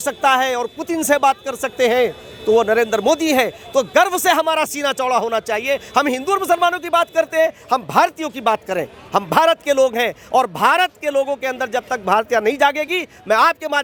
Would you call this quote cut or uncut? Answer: uncut